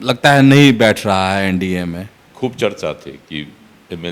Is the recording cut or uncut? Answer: uncut